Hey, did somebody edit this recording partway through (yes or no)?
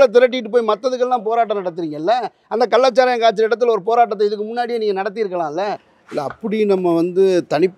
yes